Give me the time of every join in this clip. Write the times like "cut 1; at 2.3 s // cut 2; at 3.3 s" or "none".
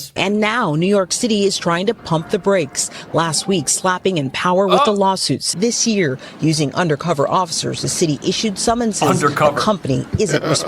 cut 1; at 5.5 s